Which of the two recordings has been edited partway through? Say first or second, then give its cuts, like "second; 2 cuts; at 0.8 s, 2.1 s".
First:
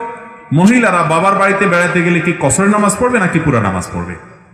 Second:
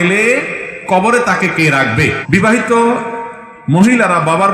second; 1 cut; at 2.2 s